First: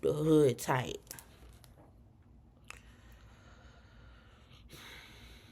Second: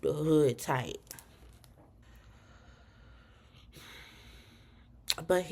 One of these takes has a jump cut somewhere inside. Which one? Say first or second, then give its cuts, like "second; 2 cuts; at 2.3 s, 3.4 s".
second; 1 cut; at 2.0 s